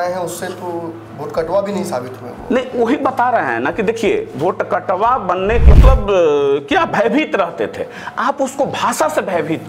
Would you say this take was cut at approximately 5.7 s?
yes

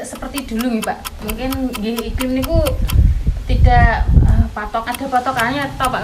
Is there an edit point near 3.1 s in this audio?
no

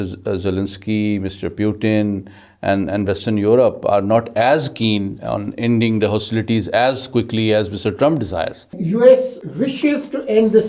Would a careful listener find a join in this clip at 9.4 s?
yes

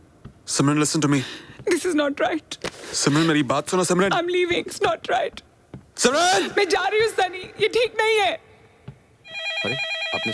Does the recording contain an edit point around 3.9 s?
no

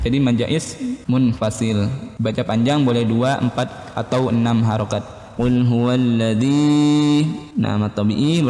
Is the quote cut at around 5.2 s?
yes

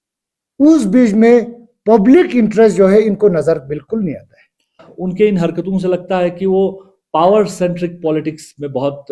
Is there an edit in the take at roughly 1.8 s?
no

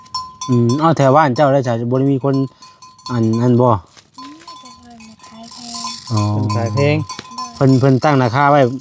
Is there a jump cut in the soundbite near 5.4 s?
no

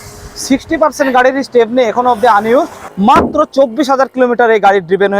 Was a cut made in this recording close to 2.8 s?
yes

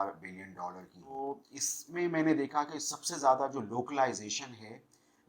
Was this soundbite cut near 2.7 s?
no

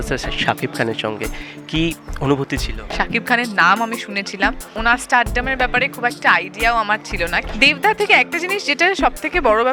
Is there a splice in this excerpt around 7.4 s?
yes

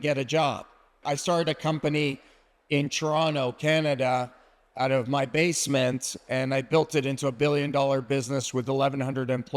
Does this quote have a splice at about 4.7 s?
no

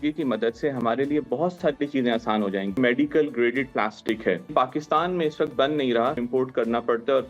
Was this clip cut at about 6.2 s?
yes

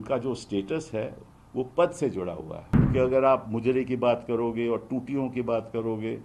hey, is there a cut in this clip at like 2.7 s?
yes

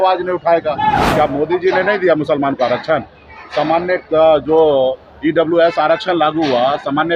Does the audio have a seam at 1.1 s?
yes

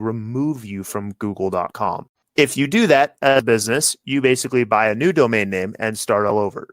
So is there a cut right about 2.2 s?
yes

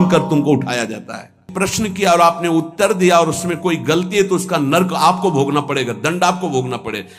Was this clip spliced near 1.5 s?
yes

